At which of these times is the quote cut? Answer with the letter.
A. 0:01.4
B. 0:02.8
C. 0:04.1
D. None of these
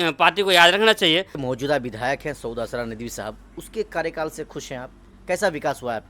A